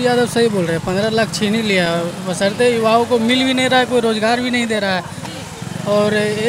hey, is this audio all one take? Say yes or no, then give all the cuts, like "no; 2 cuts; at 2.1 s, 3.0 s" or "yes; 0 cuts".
yes; 0 cuts